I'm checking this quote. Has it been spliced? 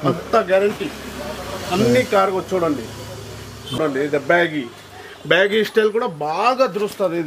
yes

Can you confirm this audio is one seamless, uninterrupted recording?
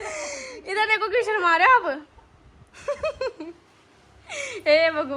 yes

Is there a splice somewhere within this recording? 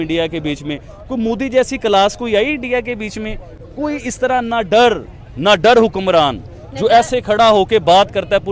no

